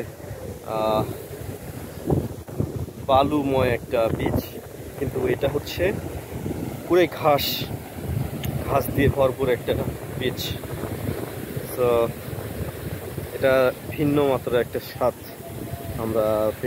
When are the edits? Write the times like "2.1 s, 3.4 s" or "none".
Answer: 13.8 s